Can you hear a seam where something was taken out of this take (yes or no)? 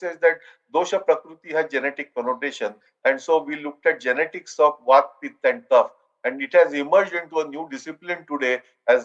no